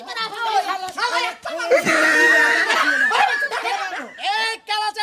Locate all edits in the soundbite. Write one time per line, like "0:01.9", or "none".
0:04.1